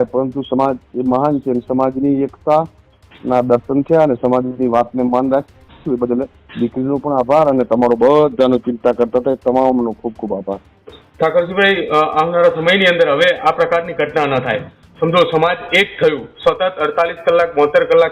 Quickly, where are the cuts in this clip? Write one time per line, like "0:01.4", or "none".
none